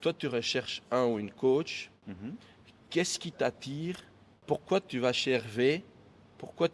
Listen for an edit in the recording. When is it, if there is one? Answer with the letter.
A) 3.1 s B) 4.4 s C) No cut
B